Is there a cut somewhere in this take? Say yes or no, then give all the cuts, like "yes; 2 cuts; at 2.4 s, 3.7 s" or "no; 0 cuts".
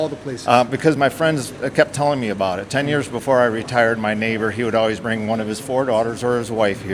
no; 0 cuts